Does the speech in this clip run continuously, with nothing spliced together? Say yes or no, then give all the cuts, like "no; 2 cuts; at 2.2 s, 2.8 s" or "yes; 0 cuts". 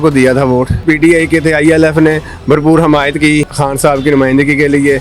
no; 2 cuts; at 0.8 s, 3.5 s